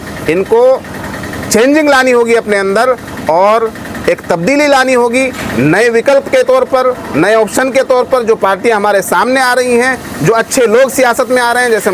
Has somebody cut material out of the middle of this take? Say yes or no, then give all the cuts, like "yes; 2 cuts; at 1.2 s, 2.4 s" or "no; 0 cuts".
no; 0 cuts